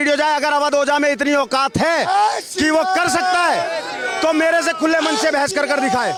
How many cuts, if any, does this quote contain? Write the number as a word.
zero